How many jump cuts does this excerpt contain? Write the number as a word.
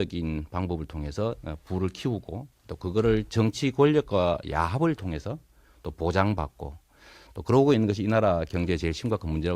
one